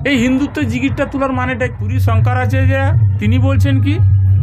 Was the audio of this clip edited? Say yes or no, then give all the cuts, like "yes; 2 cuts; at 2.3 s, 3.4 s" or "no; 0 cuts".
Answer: yes; 1 cut; at 1.9 s